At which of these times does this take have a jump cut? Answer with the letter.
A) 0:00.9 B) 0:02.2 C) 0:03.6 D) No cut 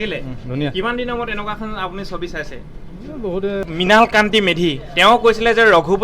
C